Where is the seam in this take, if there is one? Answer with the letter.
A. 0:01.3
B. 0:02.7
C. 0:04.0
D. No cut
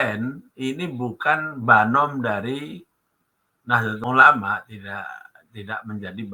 C